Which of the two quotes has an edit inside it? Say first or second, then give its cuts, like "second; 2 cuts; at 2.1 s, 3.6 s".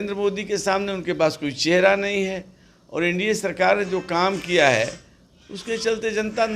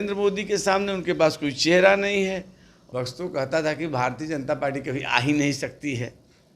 second; 1 cut; at 2.8 s